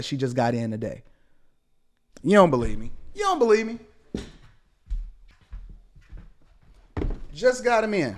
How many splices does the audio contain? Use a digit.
1